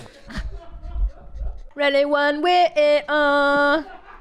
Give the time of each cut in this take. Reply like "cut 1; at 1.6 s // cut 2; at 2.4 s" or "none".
cut 1; at 1.6 s